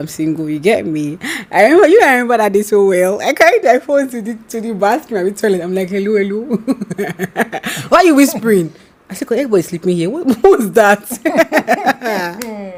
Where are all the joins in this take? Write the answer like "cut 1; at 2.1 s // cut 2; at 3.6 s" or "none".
none